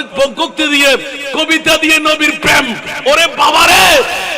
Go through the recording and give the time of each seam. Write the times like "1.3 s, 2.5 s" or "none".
none